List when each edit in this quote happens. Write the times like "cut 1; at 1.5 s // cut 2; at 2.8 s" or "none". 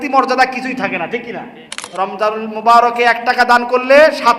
cut 1; at 1.8 s